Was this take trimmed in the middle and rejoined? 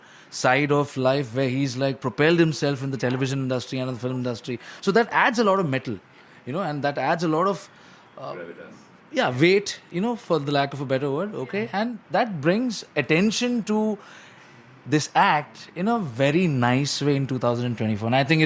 no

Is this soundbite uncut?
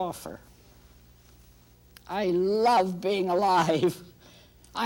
yes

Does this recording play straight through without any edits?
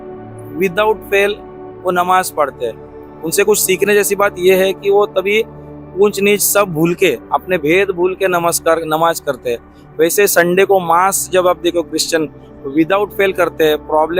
yes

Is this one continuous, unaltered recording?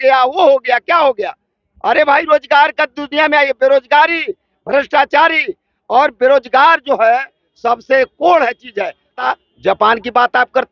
no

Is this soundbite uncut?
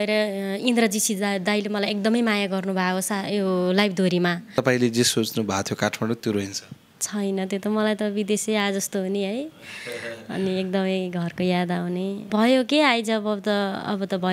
no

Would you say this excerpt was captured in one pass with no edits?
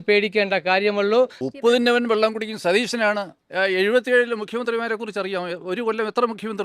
yes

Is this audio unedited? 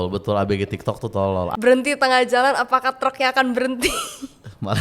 no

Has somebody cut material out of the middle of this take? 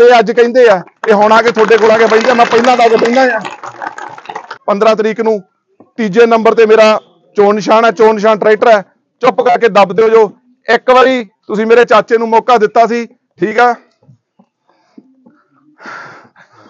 yes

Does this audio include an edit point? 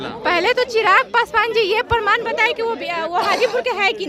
no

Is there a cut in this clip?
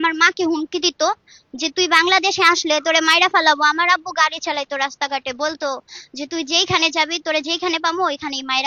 no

